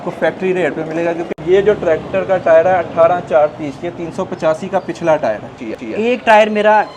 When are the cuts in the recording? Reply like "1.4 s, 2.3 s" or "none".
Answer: 1.3 s, 5.6 s